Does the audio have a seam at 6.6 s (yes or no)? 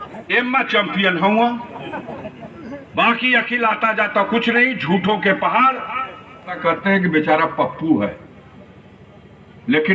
yes